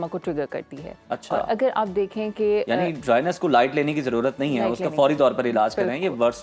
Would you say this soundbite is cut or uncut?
uncut